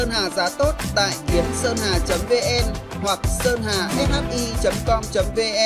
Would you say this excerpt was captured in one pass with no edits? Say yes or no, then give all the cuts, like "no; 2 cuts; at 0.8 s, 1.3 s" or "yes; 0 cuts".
yes; 0 cuts